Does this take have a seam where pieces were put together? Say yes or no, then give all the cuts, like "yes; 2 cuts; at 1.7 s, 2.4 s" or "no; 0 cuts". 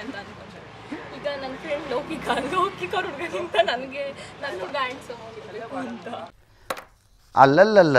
no; 0 cuts